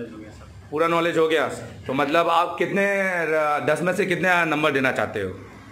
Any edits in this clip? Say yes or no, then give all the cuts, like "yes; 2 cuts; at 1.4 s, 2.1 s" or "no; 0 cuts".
no; 0 cuts